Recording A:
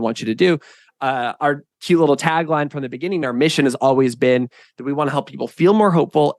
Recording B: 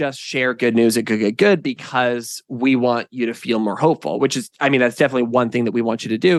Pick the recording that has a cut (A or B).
A